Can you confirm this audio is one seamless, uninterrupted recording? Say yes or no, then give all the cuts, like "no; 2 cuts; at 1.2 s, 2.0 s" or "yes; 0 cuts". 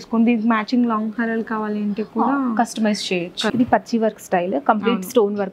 no; 1 cut; at 3.5 s